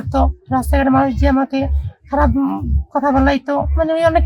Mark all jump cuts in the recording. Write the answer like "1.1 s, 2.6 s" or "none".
none

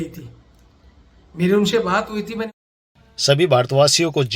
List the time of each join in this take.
2.5 s

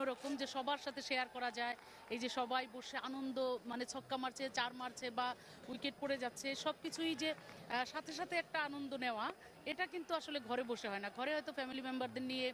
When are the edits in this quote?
none

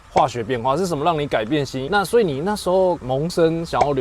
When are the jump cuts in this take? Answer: 1.8 s

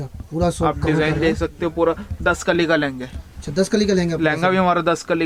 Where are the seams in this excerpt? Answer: none

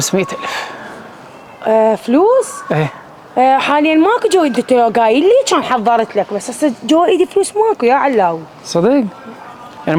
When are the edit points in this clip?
none

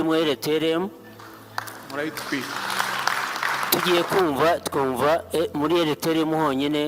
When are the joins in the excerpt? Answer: 3.7 s

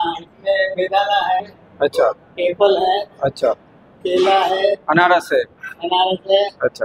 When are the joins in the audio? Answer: none

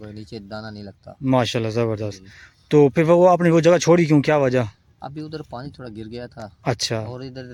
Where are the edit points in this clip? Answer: none

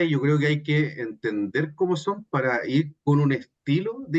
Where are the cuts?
none

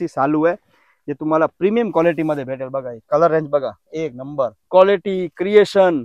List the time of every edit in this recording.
none

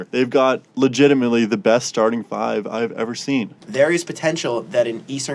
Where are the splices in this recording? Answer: 3.6 s

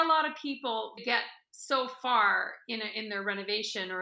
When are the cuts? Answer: 1.0 s

